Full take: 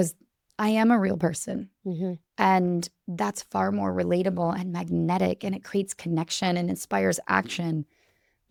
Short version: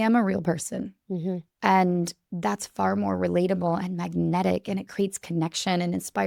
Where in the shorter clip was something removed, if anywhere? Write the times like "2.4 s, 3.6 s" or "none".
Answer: none